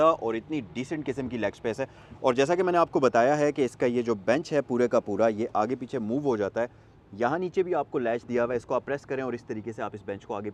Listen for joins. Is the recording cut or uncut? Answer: uncut